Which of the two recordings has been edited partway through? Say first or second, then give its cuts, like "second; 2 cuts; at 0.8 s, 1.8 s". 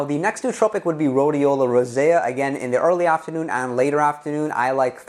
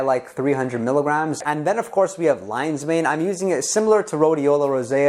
second; 1 cut; at 1.4 s